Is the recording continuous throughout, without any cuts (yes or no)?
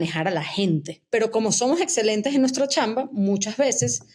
no